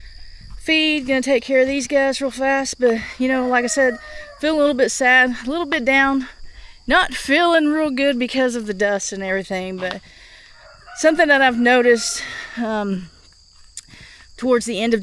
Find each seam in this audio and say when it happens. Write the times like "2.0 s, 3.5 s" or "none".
none